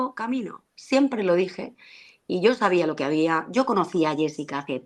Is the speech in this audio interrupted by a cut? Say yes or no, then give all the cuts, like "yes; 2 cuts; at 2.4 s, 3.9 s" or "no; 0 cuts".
no; 0 cuts